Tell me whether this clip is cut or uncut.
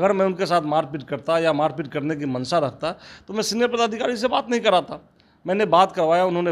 uncut